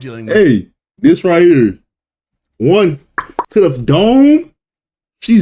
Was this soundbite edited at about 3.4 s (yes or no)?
yes